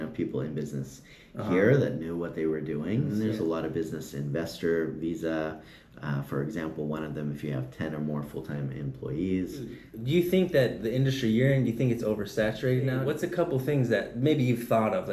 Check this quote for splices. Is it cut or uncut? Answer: cut